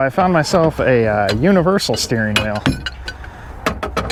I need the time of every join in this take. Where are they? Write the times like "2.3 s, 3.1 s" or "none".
none

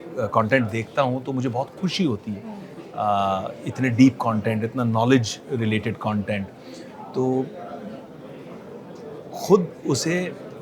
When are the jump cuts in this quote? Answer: none

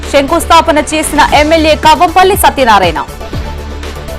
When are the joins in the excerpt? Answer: none

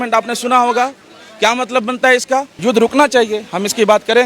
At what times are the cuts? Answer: 2.5 s

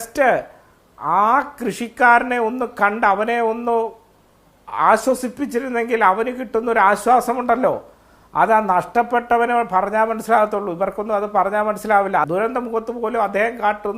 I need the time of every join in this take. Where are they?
12.3 s

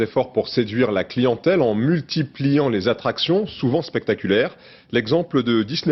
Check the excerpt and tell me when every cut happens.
none

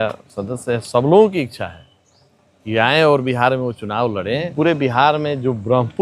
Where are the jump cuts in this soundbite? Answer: 4.5 s

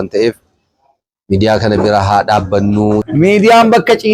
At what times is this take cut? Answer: 3.1 s

